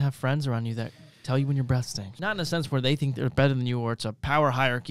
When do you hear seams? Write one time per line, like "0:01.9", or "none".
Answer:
0:02.0